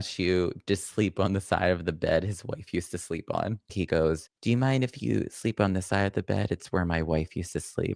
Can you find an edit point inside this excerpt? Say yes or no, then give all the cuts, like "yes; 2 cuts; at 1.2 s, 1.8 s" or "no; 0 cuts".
yes; 1 cut; at 3.7 s